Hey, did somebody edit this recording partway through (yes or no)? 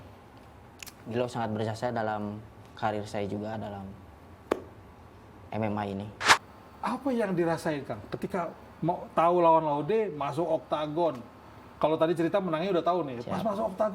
yes